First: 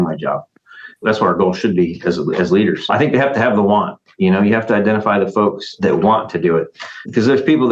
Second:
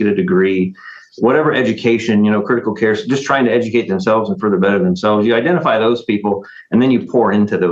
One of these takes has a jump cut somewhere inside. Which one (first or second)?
first